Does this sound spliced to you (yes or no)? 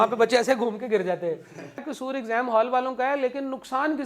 yes